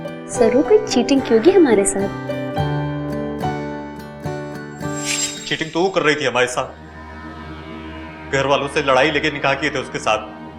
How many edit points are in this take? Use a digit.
0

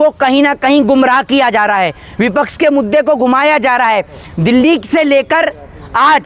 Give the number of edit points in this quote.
0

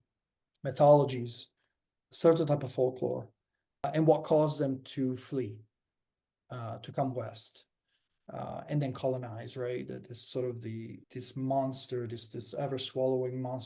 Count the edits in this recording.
2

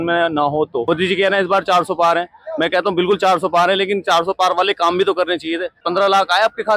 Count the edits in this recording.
2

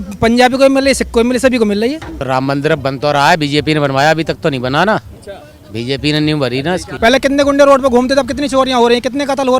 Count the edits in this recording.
2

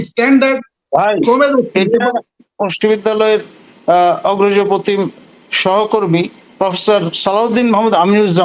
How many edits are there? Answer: 1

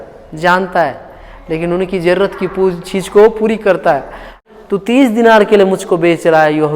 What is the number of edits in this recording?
1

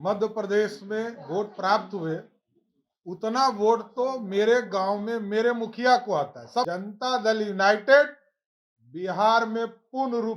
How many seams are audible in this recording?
1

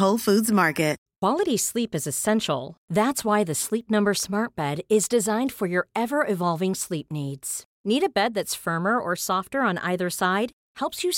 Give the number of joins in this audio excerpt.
1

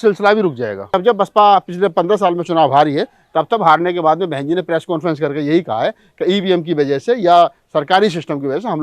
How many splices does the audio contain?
1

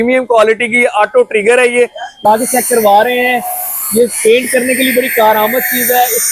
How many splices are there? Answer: 1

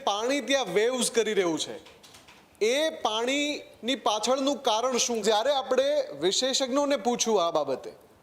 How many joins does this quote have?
1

